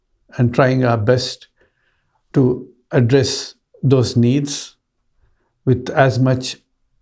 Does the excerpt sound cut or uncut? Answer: uncut